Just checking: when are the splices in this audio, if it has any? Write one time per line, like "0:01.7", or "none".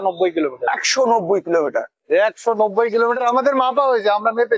none